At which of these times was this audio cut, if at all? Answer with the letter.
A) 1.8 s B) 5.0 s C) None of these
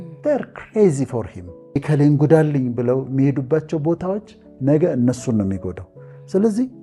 A